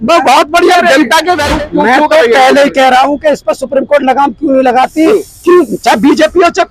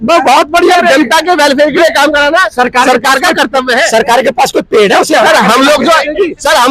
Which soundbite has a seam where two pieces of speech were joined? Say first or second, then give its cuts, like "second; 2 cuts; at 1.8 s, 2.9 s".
first; 1 cut; at 1.5 s